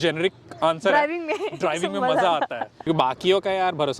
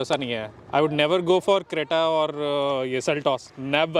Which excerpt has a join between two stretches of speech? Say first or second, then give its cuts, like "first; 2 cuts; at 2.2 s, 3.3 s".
first; 1 cut; at 2.9 s